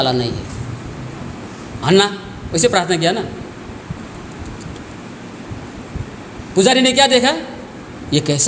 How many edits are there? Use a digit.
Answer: 1